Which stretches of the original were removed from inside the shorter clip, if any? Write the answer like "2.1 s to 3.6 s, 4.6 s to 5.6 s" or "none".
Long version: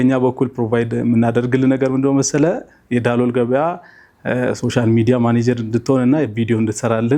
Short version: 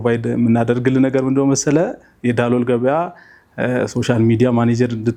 none